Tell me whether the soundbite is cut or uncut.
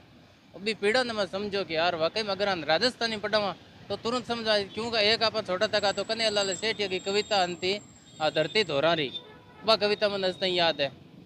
uncut